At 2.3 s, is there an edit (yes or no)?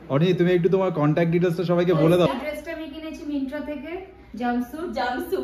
yes